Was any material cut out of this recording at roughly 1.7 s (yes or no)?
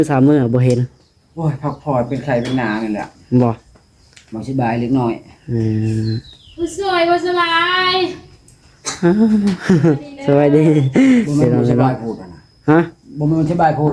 no